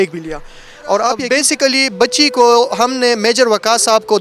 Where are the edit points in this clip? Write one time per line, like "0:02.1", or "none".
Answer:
0:01.2